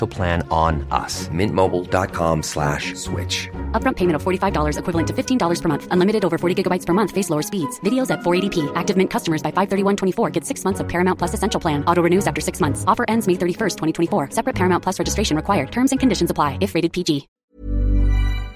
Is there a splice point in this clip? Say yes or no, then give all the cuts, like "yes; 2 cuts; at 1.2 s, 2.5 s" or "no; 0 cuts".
yes; 1 cut; at 17.4 s